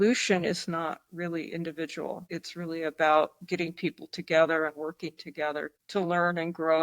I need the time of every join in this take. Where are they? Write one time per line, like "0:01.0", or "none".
0:02.2
0:05.8